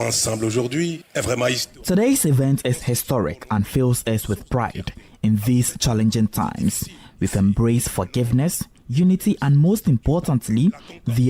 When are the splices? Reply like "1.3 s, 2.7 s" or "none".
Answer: none